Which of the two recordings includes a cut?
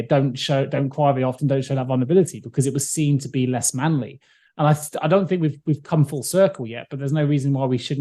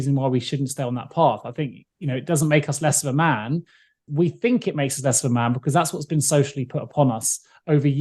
second; 1 cut; at 4.0 s

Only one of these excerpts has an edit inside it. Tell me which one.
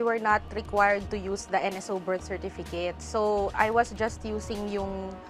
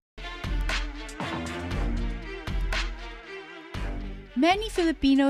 second; 1 cut; at 3.3 s

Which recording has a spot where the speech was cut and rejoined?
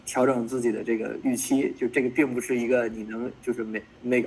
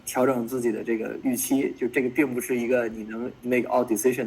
second; 1 cut; at 3.3 s

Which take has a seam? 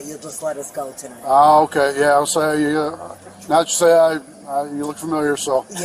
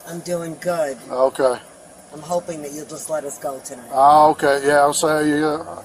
first; 1 cut; at 4.2 s

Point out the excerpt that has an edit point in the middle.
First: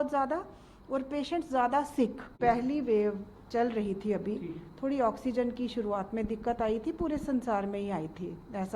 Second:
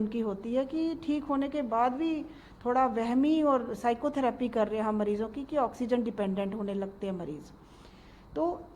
first; 1 cut; at 2.3 s

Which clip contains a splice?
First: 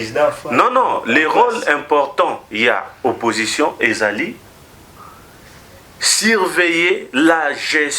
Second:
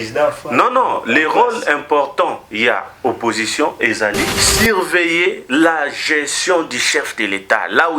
second; 1 cut; at 4.4 s

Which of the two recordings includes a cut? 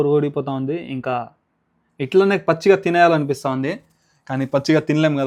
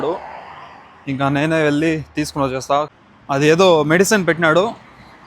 second; 1 cut; at 3.0 s

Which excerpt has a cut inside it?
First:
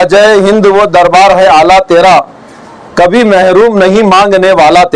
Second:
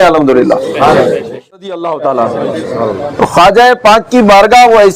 second; 1 cut; at 1.7 s

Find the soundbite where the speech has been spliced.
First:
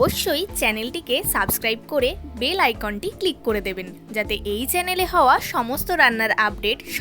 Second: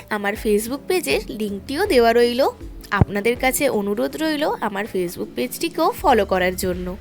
first; 1 cut; at 3.9 s

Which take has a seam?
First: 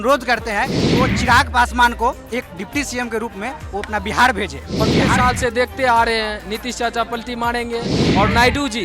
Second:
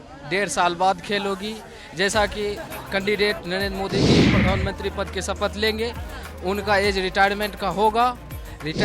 first; 1 cut; at 5.1 s

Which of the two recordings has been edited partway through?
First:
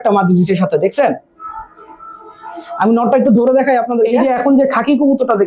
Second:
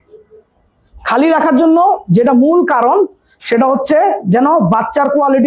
first; 1 cut; at 4.2 s

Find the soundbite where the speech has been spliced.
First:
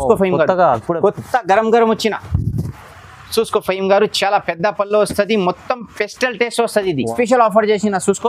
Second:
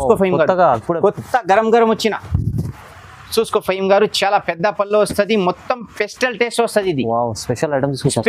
first; 1 cut; at 7.1 s

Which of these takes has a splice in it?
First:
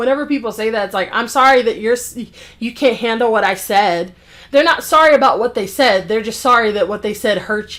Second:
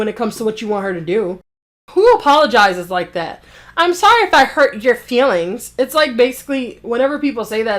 second; 1 cut; at 1.8 s

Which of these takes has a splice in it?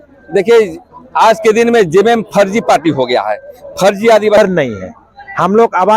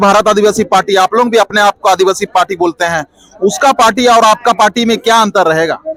first; 1 cut; at 4.4 s

